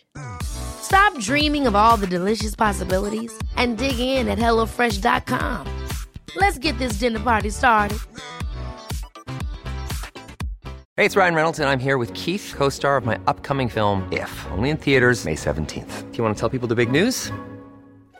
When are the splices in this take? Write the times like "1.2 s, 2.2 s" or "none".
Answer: 10.8 s